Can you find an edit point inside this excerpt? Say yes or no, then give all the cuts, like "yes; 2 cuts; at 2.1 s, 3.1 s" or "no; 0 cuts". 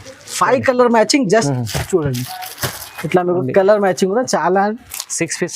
yes; 1 cut; at 1.5 s